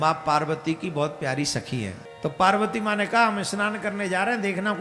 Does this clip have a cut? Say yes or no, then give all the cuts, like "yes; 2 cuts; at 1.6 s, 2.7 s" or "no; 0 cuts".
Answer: yes; 1 cut; at 2.0 s